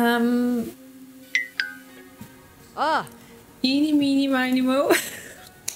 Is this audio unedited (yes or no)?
yes